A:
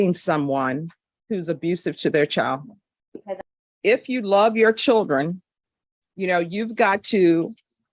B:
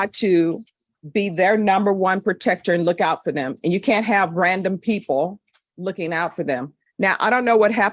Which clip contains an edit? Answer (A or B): A